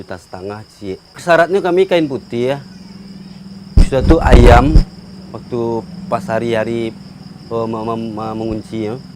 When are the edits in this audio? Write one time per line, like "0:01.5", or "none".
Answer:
0:01.2

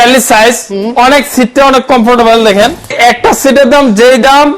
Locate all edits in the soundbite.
0:02.9

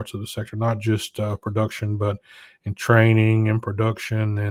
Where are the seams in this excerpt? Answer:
none

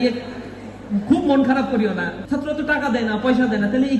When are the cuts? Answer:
0:02.1

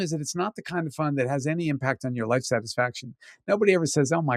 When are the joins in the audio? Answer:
none

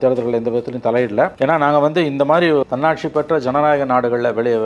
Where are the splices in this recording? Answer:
0:01.3
0:02.6

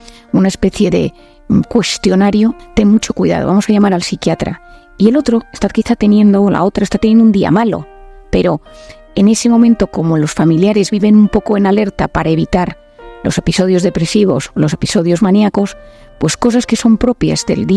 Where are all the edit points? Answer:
0:02.6

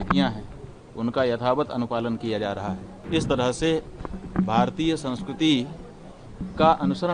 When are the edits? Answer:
0:02.9

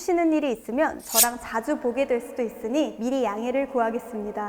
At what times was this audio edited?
none

